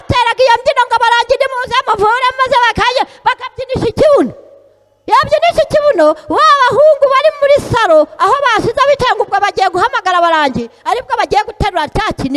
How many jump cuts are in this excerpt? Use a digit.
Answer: 0